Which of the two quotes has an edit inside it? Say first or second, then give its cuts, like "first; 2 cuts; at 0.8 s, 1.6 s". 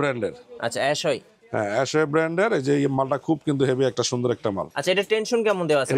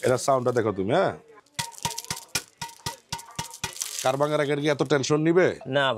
first; 1 cut; at 4.7 s